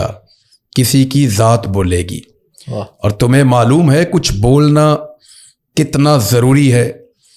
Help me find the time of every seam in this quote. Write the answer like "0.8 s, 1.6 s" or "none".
none